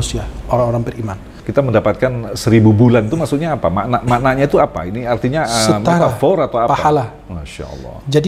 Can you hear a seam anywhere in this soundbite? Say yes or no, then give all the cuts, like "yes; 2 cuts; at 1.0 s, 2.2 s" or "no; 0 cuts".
yes; 1 cut; at 1.4 s